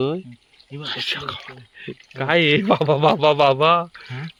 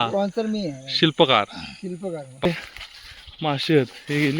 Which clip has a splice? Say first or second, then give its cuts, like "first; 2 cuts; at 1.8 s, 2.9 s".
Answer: second; 1 cut; at 2.5 s